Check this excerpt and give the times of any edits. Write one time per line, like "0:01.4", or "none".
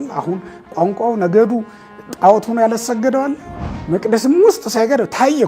0:03.7